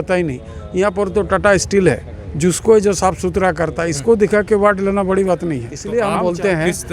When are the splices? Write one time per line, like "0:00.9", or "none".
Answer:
0:05.7